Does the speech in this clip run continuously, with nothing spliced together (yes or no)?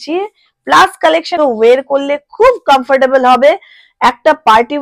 no